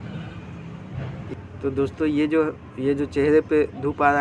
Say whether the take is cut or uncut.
cut